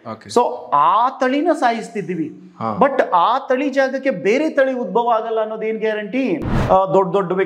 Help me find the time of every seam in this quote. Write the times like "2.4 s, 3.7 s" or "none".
6.5 s